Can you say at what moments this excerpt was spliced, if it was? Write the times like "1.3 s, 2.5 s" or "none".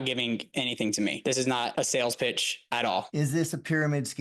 3.1 s